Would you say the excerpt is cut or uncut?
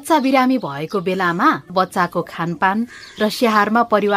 cut